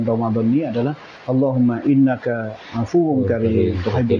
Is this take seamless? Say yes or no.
no